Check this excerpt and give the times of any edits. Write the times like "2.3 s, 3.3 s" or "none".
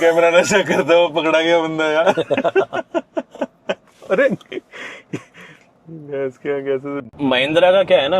7.1 s